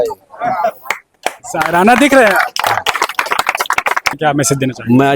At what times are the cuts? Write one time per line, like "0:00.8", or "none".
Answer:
0:04.2